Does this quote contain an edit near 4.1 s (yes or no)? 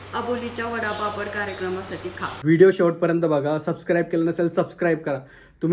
no